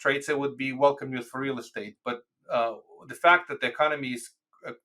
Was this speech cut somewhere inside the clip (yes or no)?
no